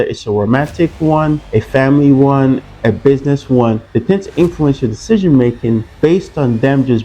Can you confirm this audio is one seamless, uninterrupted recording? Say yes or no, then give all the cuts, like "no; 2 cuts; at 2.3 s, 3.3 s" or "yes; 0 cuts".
no; 4 cuts; at 1.4 s, 2.7 s, 3.8 s, 5.9 s